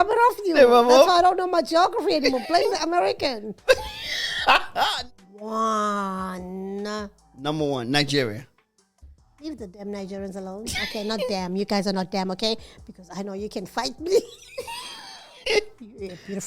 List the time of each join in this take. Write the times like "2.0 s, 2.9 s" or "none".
4.9 s